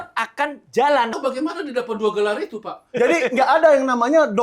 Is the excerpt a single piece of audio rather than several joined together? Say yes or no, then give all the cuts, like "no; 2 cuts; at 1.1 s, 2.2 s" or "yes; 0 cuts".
no; 1 cut; at 1.1 s